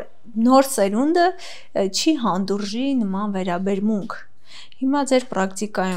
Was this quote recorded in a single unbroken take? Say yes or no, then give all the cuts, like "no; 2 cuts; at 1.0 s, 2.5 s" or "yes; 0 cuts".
yes; 0 cuts